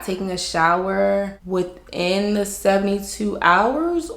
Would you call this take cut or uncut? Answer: cut